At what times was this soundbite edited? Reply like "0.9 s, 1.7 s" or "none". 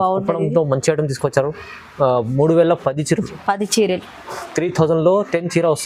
none

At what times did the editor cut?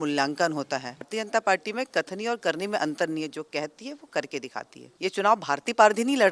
1.1 s, 4.8 s

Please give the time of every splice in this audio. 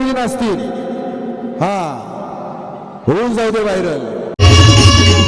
4.3 s

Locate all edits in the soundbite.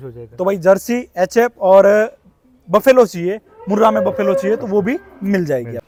none

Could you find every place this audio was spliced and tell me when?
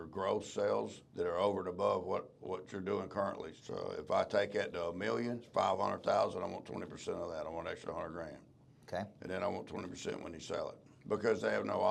1.0 s, 3.5 s, 5.5 s, 10.9 s

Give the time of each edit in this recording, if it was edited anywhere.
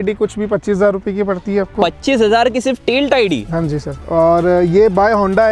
none

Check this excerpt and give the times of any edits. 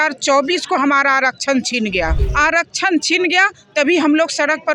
2.2 s

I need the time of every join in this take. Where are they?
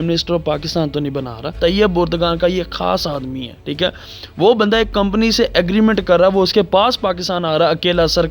1.5 s

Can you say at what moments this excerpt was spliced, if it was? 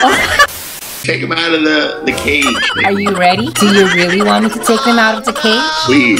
1.0 s

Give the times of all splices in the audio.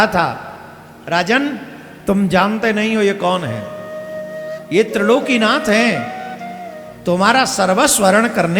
none

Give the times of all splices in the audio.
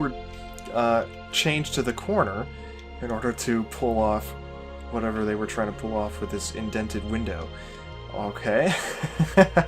5.8 s

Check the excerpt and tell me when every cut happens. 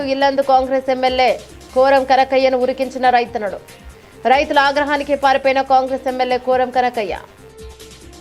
none

